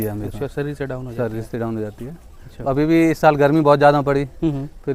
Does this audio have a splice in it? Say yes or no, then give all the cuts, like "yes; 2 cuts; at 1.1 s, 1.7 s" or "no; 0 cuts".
no; 0 cuts